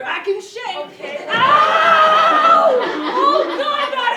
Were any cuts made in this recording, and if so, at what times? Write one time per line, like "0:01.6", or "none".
none